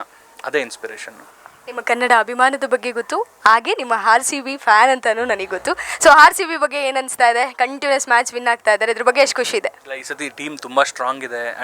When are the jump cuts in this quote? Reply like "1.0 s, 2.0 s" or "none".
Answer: none